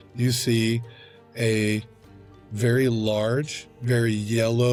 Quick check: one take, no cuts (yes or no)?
yes